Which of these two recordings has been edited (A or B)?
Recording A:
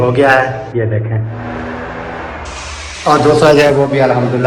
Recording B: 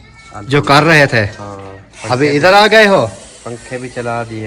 A